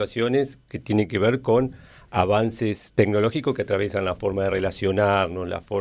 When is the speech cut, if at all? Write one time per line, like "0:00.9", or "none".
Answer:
none